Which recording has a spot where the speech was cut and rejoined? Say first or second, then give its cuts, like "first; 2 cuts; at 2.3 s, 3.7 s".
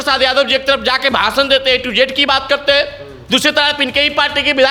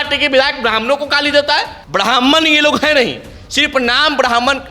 second; 1 cut; at 1.8 s